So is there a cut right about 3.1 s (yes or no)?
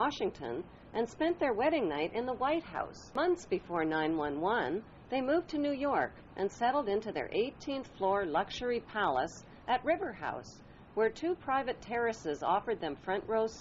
yes